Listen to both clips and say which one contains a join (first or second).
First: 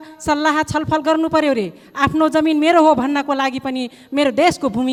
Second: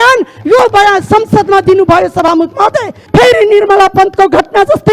second